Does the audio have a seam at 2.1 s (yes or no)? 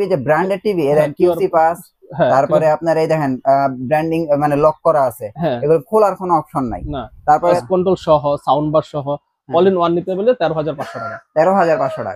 no